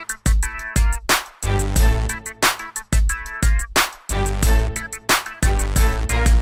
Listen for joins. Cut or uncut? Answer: uncut